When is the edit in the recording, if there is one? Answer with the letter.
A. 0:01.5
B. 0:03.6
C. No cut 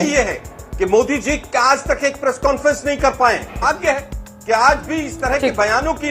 B